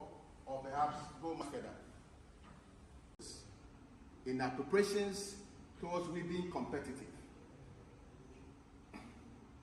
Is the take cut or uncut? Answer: cut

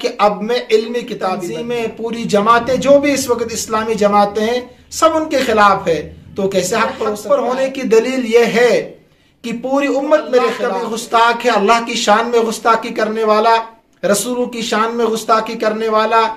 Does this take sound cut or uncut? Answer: cut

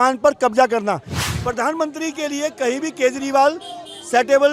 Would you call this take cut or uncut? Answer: cut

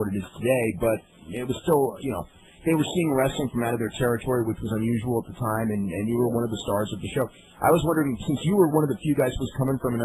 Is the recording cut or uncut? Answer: uncut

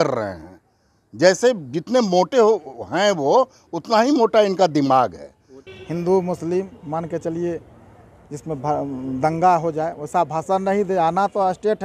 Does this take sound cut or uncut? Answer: cut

